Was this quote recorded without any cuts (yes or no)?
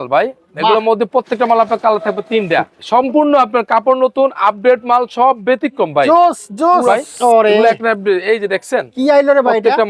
no